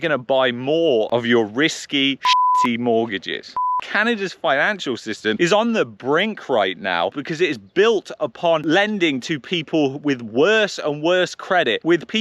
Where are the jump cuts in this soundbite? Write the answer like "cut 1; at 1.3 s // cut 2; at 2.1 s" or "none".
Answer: cut 1; at 3.5 s // cut 2; at 7.1 s